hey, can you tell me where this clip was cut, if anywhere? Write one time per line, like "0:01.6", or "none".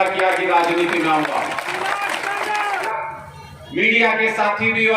0:02.9